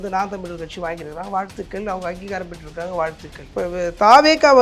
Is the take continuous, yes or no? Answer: no